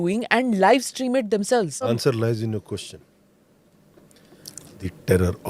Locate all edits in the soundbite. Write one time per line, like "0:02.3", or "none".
0:01.9